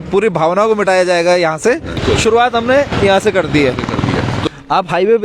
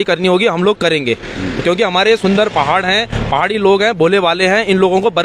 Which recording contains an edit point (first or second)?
first